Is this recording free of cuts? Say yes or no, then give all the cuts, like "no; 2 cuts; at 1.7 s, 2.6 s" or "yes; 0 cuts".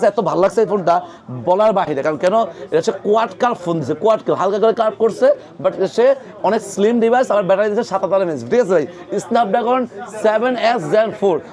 yes; 0 cuts